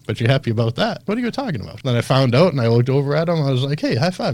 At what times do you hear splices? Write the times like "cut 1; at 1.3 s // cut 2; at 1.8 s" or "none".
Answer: cut 1; at 1.3 s

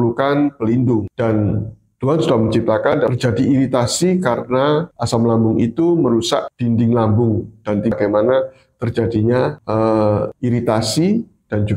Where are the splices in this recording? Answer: cut 1; at 3.1 s // cut 2; at 7.9 s

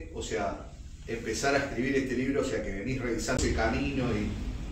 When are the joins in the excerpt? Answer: cut 1; at 3.4 s

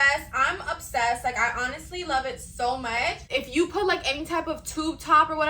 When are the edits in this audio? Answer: cut 1; at 3.3 s

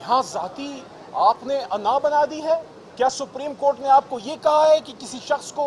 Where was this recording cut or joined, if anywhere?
cut 1; at 2.8 s

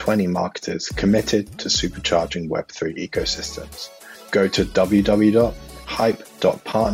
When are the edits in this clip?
none

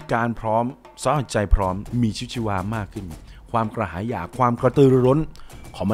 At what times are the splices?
cut 1; at 1.8 s

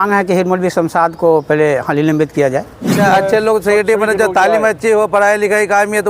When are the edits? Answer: cut 1; at 3.0 s

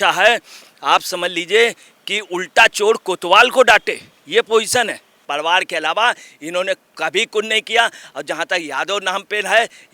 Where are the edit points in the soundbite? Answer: cut 1; at 5.2 s

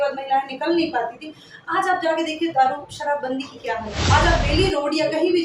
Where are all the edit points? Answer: cut 1; at 4.0 s

